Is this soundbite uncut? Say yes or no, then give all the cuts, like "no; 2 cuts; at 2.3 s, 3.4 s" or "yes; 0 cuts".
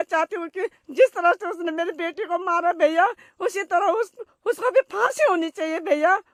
yes; 0 cuts